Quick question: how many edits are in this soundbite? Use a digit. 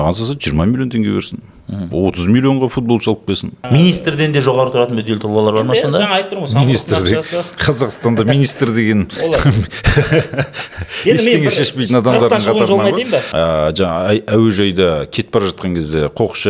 2